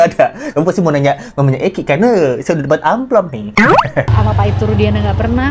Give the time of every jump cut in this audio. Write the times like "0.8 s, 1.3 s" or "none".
4.1 s